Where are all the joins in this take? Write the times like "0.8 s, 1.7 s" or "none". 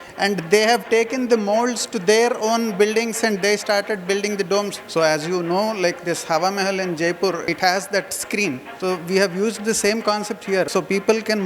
4.7 s, 7.4 s, 8.7 s, 10.7 s